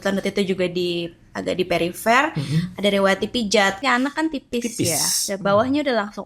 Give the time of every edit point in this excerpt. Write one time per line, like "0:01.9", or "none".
0:03.8